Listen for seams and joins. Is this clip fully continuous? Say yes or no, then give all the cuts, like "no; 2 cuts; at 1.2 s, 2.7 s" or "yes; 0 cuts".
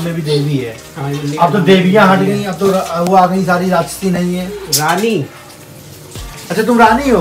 yes; 0 cuts